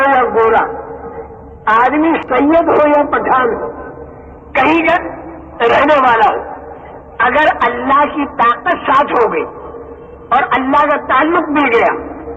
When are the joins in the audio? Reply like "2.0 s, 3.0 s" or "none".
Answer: 2.2 s